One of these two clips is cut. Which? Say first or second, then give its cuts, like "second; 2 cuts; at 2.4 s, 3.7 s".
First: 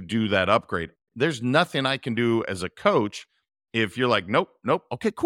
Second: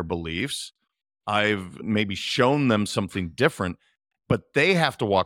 second; 1 cut; at 1.8 s